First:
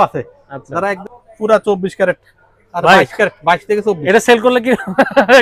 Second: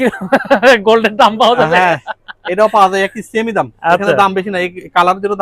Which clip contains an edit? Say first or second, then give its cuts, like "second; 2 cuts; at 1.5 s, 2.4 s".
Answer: first; 1 cut; at 1.0 s